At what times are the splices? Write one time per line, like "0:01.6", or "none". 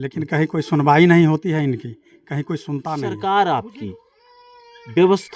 0:03.0